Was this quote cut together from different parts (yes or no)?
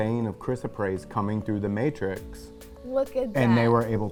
no